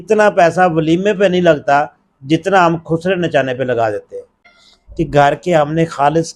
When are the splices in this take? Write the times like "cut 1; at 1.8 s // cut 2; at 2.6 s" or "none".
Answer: cut 1; at 4.4 s